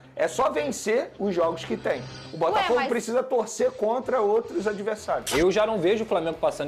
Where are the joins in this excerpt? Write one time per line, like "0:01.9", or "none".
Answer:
0:05.2